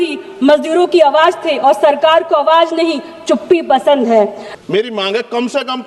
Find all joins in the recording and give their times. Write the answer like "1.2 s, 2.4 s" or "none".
4.4 s